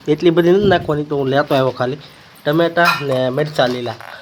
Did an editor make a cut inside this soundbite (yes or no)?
no